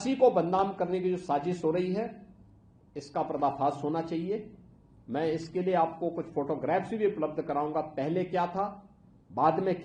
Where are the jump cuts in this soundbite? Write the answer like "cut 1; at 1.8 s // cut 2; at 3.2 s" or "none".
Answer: none